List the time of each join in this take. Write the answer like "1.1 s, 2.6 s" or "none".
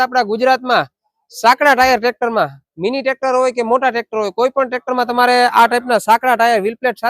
none